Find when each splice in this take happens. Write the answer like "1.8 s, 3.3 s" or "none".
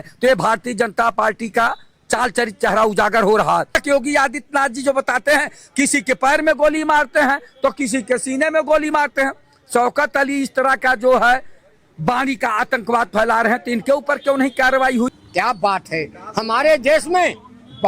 3.7 s, 15.1 s